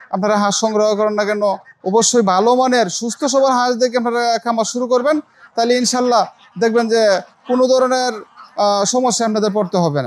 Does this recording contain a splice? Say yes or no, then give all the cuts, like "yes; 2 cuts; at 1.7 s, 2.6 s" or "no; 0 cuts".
no; 0 cuts